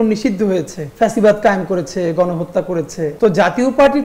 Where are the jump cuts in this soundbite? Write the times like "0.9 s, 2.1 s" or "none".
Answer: 3.1 s